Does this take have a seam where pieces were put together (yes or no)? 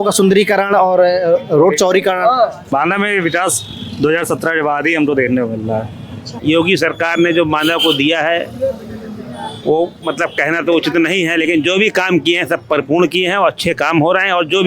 yes